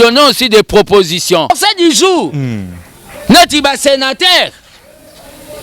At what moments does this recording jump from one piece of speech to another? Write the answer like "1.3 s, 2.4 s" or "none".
1.5 s